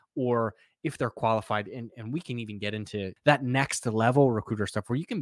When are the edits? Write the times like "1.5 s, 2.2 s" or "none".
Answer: 3.1 s